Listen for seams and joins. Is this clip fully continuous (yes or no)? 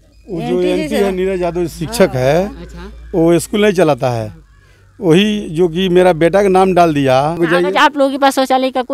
no